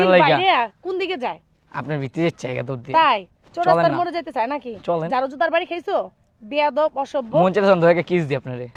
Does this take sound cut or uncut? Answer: uncut